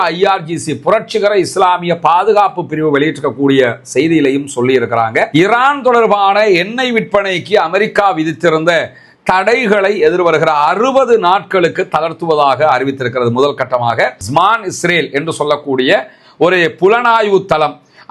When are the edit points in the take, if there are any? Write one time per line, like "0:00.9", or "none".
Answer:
0:05.3
0:14.2